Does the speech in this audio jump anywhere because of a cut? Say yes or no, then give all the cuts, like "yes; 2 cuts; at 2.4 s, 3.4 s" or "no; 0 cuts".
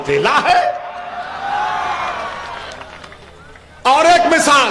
no; 0 cuts